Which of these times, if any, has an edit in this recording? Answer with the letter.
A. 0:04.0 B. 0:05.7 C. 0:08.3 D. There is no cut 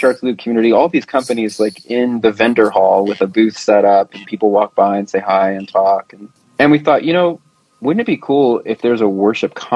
D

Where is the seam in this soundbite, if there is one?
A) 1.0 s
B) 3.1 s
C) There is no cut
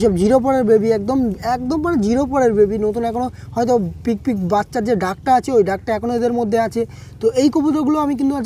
C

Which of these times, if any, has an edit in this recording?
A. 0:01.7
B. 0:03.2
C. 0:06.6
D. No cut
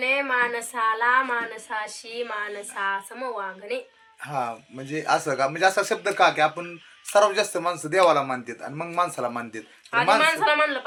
D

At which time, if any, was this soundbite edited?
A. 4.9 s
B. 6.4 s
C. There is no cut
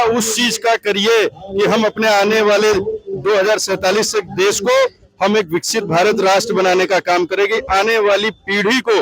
C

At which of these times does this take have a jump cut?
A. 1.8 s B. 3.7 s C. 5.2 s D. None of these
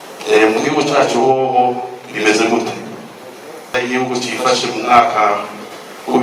B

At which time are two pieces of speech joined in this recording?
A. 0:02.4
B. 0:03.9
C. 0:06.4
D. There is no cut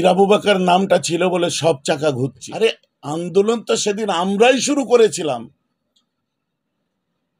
A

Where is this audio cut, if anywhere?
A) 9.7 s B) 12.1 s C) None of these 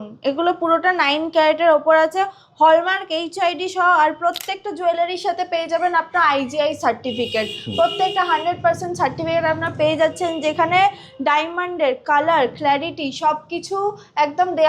C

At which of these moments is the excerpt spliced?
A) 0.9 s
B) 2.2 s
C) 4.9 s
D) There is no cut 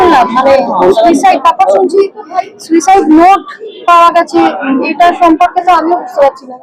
D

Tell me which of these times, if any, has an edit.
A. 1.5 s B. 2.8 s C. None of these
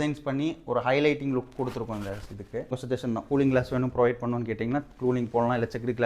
B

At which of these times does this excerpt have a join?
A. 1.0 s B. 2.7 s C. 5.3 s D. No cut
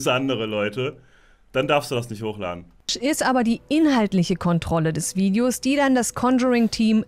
B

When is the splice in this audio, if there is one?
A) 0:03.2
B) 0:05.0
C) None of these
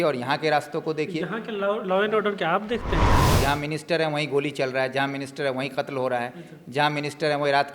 A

